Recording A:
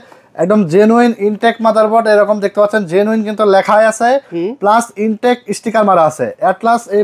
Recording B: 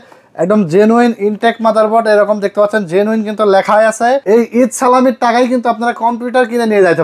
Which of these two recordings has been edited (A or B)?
B